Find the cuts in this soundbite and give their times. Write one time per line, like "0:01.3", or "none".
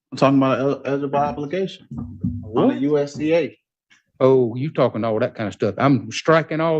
none